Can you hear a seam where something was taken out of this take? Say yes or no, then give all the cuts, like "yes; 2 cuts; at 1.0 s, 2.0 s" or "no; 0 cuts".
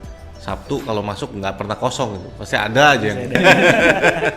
yes; 1 cut; at 3.4 s